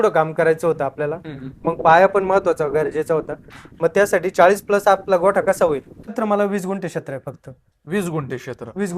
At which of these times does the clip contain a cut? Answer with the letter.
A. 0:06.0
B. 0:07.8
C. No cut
A